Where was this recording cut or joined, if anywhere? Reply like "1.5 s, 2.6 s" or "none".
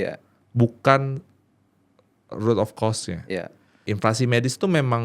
3.8 s